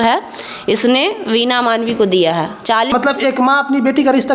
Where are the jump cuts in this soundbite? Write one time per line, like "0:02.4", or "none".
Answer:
0:02.9